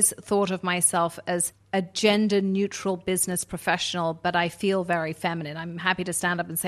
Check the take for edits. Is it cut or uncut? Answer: cut